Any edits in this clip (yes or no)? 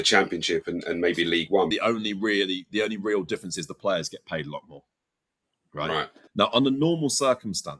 yes